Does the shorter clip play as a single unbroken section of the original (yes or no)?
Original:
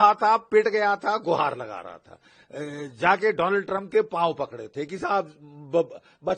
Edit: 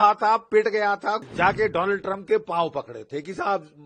no